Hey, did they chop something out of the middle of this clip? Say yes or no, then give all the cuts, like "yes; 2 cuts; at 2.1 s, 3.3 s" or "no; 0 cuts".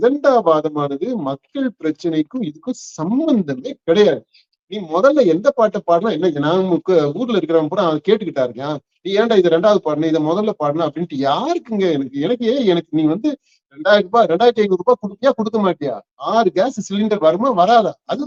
no; 0 cuts